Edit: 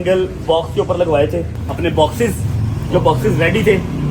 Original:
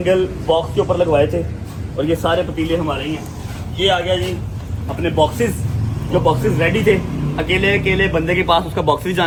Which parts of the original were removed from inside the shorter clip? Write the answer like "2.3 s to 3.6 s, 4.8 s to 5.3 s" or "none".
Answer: 1.6 s to 4.8 s